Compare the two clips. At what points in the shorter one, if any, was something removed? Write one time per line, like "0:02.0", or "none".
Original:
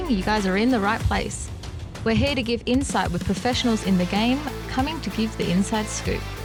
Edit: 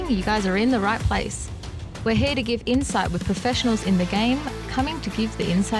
none